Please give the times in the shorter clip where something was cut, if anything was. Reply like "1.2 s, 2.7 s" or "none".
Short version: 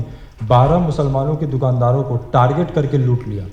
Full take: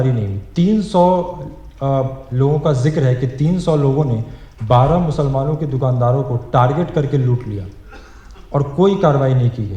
none